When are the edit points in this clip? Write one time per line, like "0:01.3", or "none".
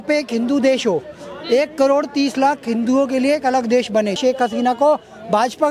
0:04.2

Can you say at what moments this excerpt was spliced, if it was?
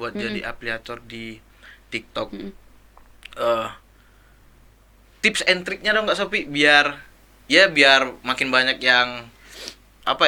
none

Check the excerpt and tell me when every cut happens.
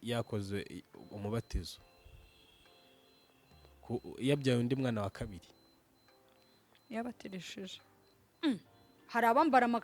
0:08.0

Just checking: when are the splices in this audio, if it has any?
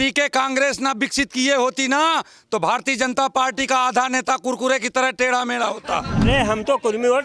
0:06.3

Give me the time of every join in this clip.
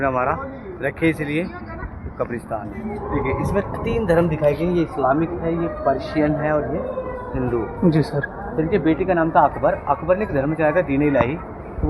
0:03.0

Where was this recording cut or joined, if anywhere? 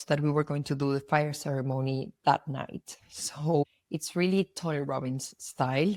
none

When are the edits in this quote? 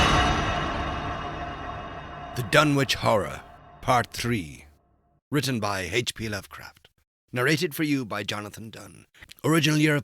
0:02.2

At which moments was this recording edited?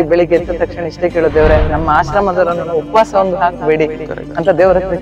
none

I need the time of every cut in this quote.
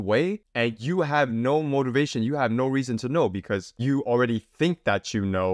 0:03.7

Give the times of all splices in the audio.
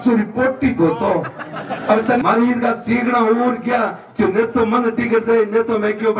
0:02.2

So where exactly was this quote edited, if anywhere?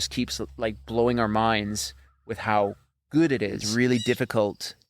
0:03.6

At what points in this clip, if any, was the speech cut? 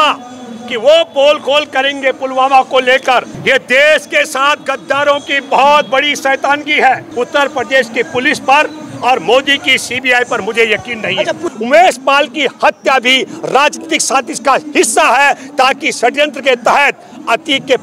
0:03.3
0:07.1
0:11.5

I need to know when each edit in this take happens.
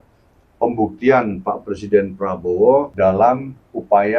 0:02.9

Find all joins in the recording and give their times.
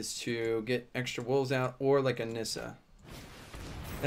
none

